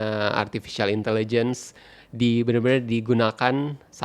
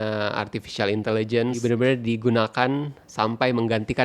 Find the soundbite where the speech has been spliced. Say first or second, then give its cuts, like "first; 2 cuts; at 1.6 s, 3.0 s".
second; 1 cut; at 1.6 s